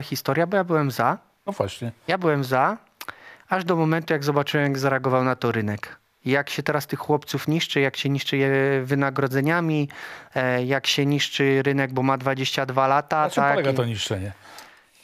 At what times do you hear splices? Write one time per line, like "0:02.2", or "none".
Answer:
none